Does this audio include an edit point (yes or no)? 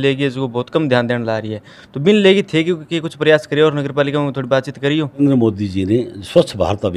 yes